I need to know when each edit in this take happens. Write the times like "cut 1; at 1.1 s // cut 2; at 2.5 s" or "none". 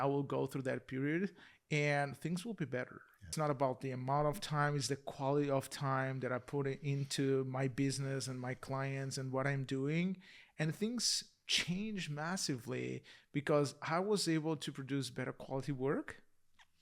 cut 1; at 3.3 s